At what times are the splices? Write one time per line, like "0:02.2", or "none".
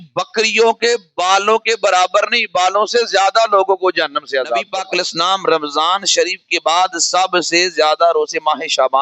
0:04.7